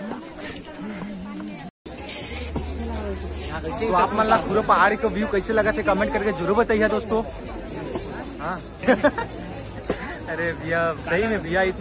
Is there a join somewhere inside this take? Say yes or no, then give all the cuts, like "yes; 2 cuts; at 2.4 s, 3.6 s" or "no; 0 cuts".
yes; 2 cuts; at 1.8 s, 8.8 s